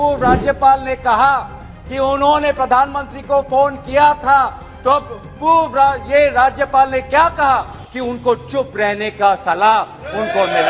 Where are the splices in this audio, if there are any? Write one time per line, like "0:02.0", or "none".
none